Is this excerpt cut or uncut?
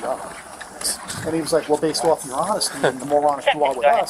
uncut